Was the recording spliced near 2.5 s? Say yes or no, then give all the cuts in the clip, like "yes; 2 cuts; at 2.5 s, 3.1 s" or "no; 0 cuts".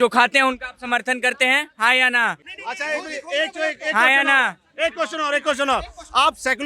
yes; 1 cut; at 2.5 s